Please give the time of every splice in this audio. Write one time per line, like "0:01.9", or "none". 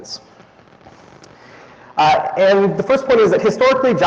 0:01.0